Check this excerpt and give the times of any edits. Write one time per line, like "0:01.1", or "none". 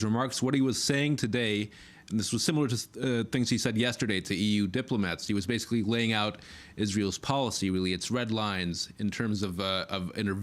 0:07.7